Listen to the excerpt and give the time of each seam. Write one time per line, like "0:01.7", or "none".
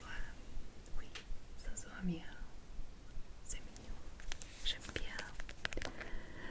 none